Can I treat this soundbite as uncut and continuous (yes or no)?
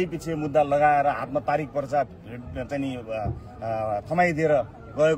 yes